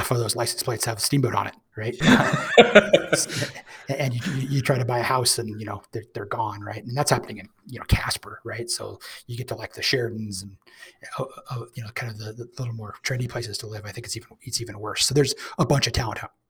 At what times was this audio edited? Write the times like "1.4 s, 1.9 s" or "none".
2.0 s

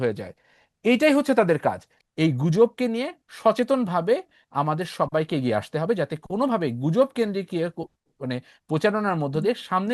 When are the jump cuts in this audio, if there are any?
1.9 s

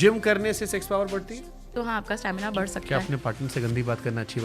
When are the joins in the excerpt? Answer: 1.7 s, 2.8 s

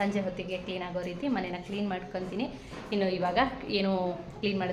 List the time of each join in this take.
none

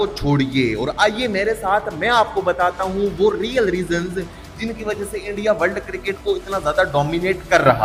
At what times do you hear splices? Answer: none

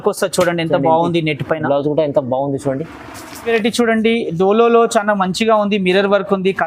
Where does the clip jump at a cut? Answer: 3.4 s

